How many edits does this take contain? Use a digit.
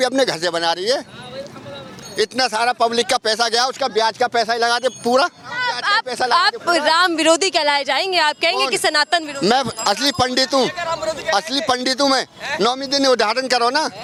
0